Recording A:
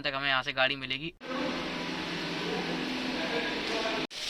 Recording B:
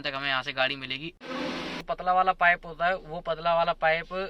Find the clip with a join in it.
B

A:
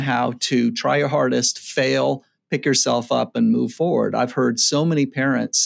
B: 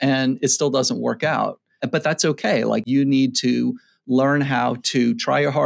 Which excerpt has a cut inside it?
B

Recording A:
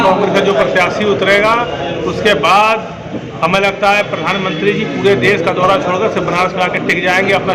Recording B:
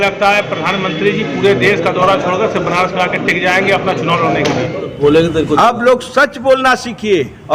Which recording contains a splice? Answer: B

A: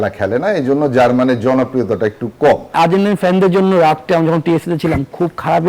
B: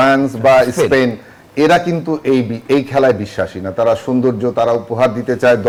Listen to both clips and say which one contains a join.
A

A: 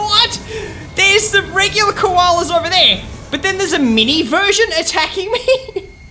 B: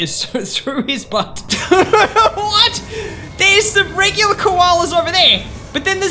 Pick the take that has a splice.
B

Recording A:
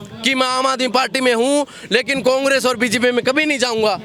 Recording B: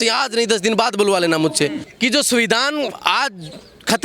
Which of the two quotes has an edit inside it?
B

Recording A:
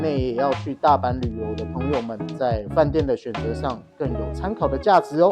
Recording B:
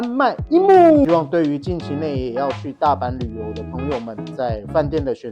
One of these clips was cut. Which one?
B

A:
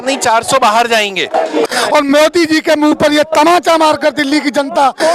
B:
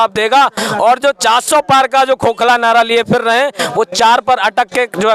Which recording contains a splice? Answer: A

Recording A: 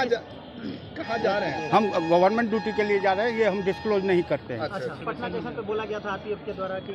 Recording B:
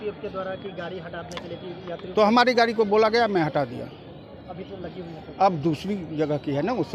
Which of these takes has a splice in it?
A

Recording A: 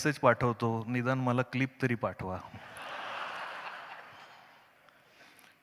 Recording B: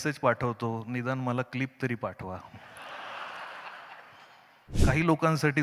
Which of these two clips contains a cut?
B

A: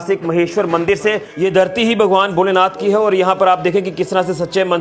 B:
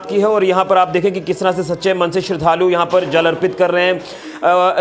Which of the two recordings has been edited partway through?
A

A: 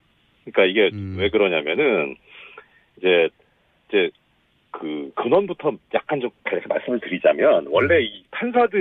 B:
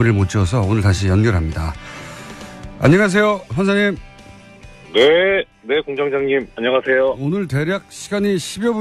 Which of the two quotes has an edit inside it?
A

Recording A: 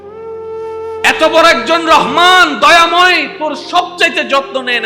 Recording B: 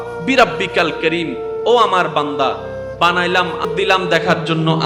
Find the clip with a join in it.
B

